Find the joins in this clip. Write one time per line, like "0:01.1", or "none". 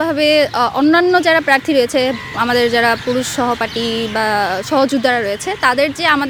none